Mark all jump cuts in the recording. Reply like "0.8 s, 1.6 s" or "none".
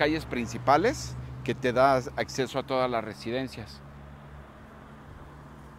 none